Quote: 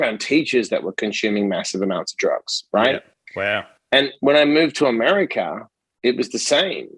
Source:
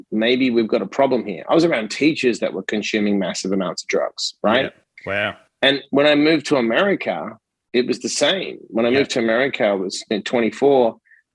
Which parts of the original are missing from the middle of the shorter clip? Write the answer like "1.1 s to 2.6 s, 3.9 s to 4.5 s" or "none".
none